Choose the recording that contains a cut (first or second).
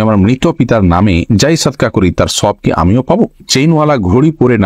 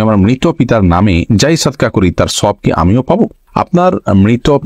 first